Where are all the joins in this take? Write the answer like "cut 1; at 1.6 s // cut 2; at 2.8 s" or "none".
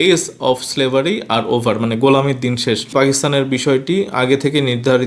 cut 1; at 2.9 s